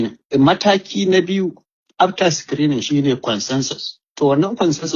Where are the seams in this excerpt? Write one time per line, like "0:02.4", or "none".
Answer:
none